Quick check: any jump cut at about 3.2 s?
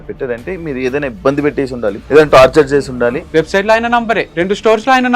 yes; 3 cuts; at 2.0 s, 3.2 s, 4.3 s

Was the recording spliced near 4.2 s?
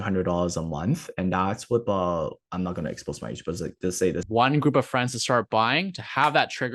yes; 1 cut; at 4.2 s

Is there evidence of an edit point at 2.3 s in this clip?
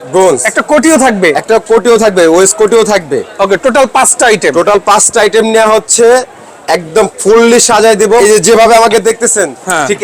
no; 1 cut; at 8.2 s

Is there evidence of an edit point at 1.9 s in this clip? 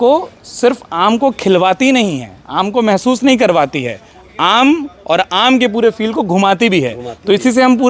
no; 0 cuts

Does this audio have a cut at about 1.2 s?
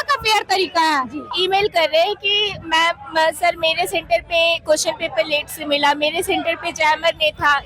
yes; 1 cut; at 1.2 s

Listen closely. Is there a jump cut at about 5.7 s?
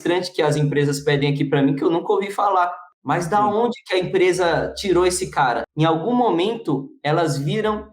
yes; 2 cuts; at 2.9 s, 5.7 s

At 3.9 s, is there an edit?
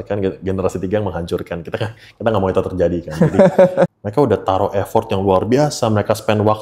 yes; 1 cut; at 3.9 s

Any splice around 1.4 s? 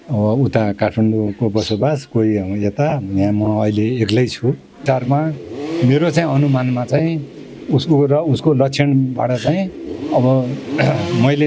no; 1 cut; at 4.8 s

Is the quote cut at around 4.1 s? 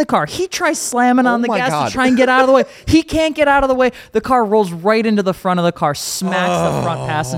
no; 0 cuts

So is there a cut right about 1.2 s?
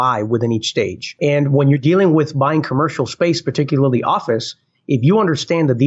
yes; 1 cut; at 1.2 s

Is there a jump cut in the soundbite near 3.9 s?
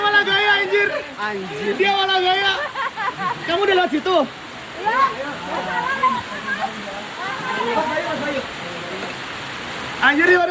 no; 0 cuts

